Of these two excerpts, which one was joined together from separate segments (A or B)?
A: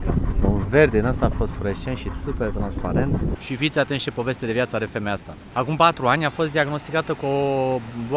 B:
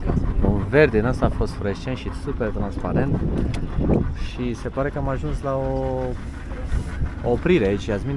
A